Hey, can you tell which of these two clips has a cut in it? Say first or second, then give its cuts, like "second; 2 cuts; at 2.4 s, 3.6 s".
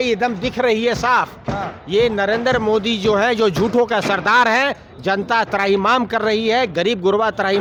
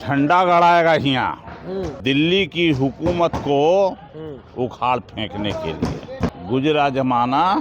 second; 2 cuts; at 1.9 s, 6.3 s